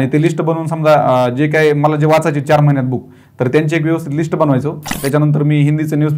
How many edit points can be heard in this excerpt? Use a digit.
1